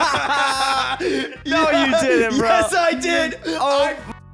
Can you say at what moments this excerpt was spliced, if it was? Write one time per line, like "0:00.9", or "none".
none